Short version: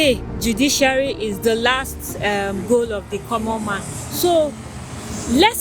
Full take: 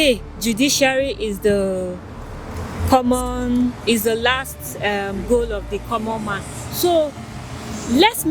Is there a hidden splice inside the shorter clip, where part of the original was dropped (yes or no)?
yes